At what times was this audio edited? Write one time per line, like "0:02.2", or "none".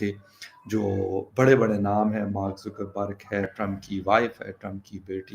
0:03.5